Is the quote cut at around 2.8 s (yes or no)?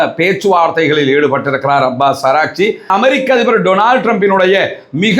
yes